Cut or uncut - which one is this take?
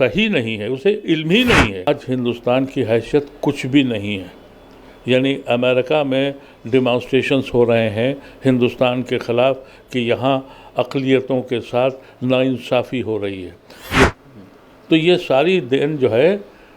cut